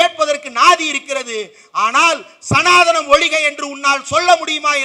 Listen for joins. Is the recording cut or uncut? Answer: uncut